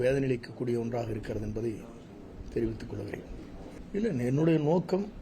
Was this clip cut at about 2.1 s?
no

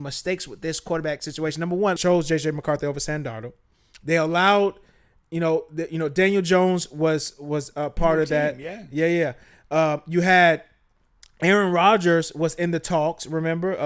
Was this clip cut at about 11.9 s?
no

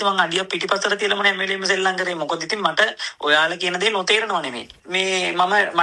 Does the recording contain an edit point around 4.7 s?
yes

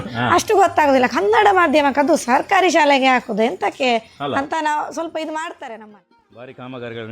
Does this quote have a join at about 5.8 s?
yes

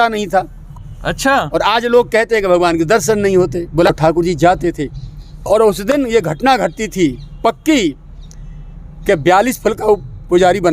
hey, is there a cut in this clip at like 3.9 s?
yes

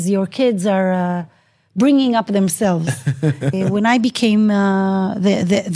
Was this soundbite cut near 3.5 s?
yes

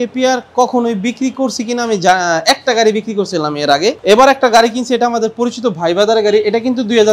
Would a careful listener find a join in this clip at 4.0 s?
yes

